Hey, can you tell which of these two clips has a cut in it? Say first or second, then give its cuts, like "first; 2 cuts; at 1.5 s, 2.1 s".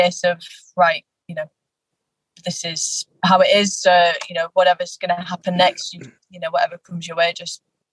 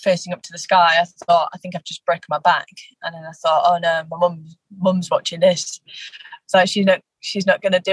first; 1 cut; at 6.1 s